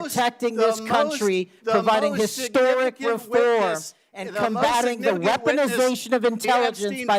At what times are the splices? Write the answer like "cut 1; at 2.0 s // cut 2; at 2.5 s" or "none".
none